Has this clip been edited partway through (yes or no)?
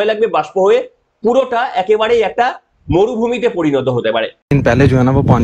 yes